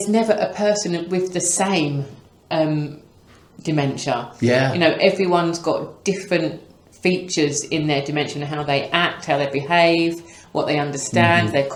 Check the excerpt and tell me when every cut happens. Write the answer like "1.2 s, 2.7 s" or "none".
none